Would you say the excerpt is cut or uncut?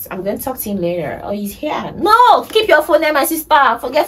uncut